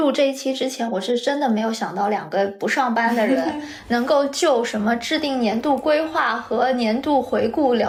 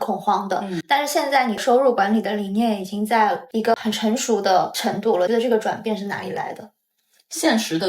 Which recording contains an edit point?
second; 3 cuts; at 1.6 s, 3.4 s, 5.2 s

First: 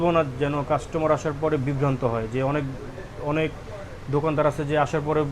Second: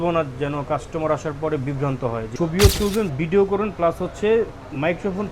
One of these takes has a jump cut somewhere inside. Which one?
second; 1 cut; at 2.3 s

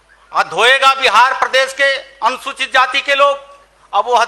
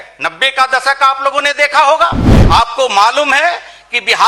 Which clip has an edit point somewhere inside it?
second; 1 cut; at 2.3 s

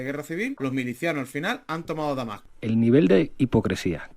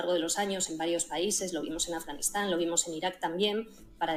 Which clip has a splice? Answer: first; 1 cut; at 2.4 s

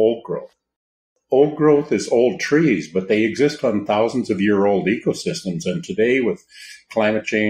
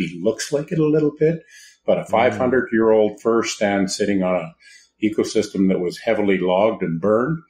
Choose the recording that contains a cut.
first; 1 cut; at 1.1 s

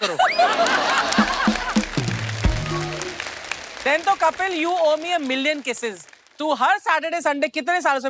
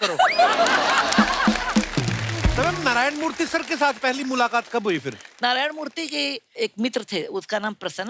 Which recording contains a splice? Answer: second; 1 cut; at 2.5 s

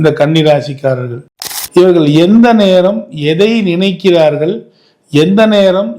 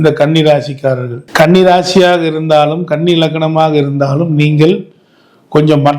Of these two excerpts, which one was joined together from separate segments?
first; 1 cut; at 1.2 s

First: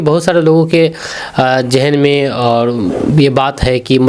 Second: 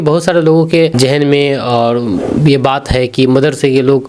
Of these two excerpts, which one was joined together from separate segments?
second; 1 cut; at 0.9 s

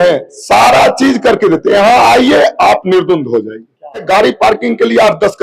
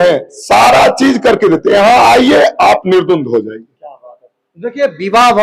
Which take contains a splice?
first; 1 cut; at 4.0 s

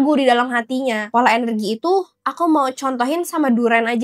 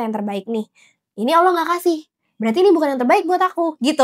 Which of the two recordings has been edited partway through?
first; 1 cut; at 1.0 s

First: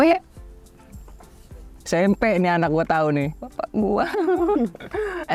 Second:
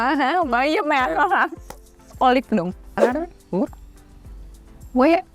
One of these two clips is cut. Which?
second; 1 cut; at 3.0 s

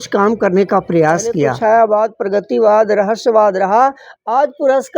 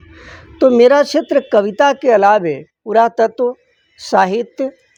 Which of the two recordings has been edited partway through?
first; 1 cut; at 1.5 s

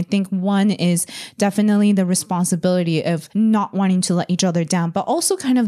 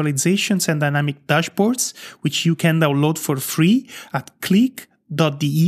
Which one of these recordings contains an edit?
first; 1 cut; at 3.2 s

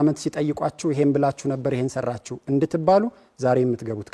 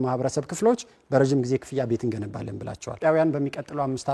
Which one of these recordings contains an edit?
second; 1 cut; at 3.0 s

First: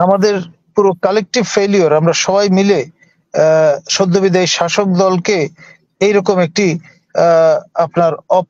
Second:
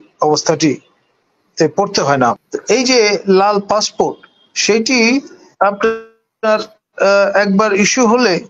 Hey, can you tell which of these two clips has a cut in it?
second; 1 cut; at 2.5 s

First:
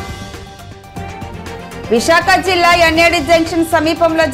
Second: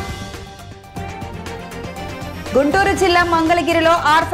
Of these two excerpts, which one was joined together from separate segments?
first; 1 cut; at 1.9 s

